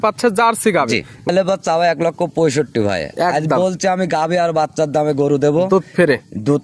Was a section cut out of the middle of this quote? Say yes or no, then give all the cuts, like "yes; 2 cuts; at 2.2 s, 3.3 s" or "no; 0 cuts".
yes; 1 cut; at 1.3 s